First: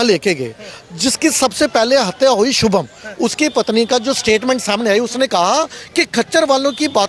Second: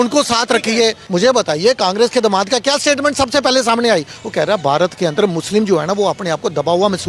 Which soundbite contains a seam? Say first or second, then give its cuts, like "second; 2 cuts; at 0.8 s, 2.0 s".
second; 1 cut; at 1.0 s